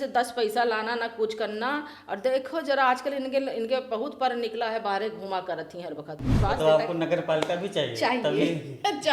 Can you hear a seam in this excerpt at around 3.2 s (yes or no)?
no